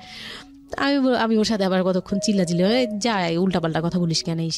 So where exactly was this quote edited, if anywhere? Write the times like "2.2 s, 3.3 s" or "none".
none